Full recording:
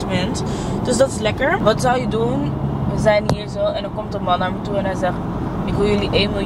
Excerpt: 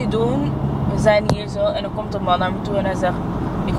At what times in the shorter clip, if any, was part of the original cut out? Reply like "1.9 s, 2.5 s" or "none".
none